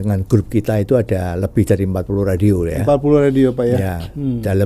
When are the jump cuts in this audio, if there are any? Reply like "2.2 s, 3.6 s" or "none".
none